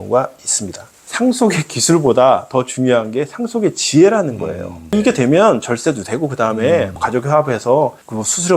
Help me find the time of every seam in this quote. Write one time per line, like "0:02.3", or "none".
0:01.1
0:04.9